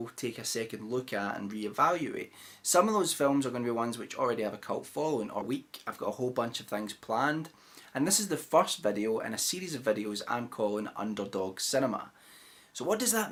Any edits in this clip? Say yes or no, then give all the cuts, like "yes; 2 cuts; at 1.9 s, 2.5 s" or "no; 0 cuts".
no; 0 cuts